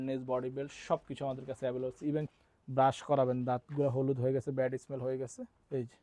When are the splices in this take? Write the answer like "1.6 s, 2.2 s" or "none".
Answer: 2.3 s